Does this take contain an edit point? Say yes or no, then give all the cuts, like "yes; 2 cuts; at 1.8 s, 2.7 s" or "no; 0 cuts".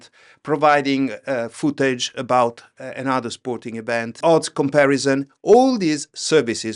yes; 1 cut; at 4.2 s